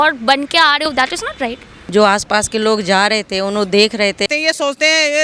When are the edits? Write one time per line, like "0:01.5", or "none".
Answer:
0:01.5
0:04.3